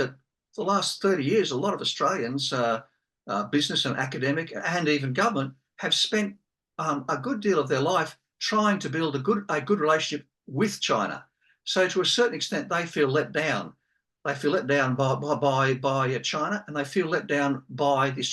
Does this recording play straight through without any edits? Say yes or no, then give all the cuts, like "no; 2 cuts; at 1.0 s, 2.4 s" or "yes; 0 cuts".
yes; 0 cuts